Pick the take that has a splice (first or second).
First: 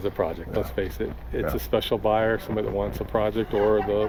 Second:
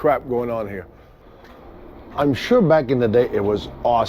second